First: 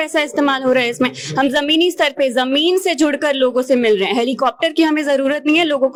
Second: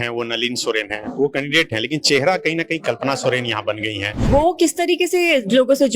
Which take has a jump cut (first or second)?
second